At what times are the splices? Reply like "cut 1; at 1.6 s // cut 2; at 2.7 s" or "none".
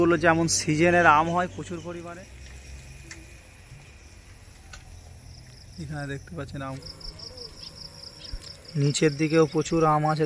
cut 1; at 2.0 s // cut 2; at 6.8 s